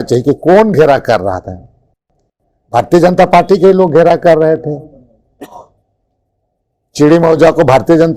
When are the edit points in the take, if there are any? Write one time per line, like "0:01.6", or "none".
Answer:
none